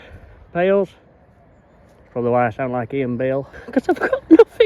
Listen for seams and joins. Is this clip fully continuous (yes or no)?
no